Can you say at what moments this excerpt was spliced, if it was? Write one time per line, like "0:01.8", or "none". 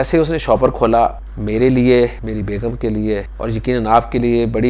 0:01.3
0:02.2
0:03.3